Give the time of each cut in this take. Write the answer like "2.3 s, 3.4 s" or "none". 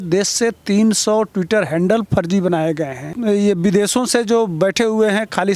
none